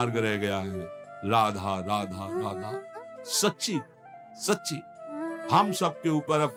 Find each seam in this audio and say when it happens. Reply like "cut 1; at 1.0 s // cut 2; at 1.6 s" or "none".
none